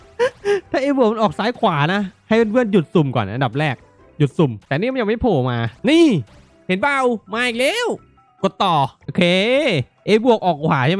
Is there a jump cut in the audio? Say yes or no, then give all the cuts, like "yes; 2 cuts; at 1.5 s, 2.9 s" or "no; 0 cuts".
yes; 3 cuts; at 4.6 s, 5.7 s, 9.0 s